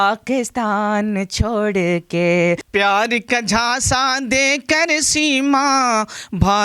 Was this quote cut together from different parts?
yes; 1 cut; at 2.7 s

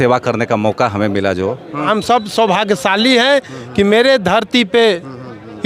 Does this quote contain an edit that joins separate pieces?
yes; 1 cut; at 1.9 s

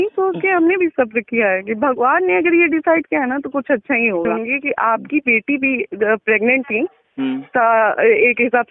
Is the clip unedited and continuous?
no; 1 cut; at 4.3 s

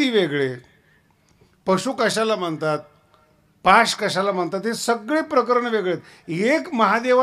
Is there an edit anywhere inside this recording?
no; 0 cuts

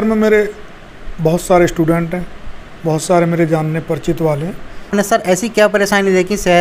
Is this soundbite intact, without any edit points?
no; 1 cut; at 4.9 s

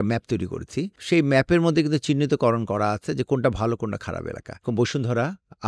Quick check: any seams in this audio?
yes; 2 cuts; at 1.0 s, 4.6 s

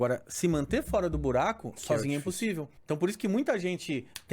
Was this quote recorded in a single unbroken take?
no; 1 cut; at 2.7 s

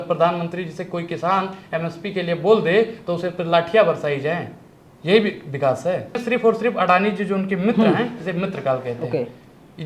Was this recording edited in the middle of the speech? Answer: yes; 1 cut; at 6.2 s

